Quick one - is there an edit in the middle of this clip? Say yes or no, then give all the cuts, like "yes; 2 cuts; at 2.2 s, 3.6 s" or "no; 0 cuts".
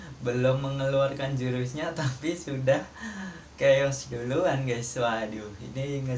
no; 0 cuts